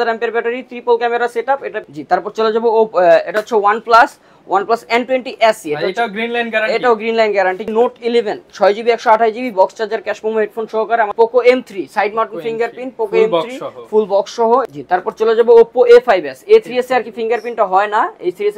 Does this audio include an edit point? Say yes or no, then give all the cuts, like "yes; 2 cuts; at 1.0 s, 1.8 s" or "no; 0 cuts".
yes; 4 cuts; at 1.7 s, 7.6 s, 11.1 s, 14.7 s